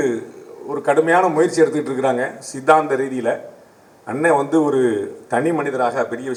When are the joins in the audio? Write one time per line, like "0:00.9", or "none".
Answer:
none